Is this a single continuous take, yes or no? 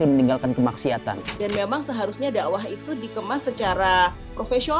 no